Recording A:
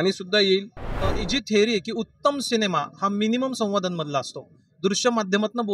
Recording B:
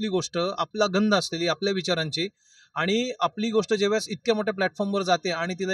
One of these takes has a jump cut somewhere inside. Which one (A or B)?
A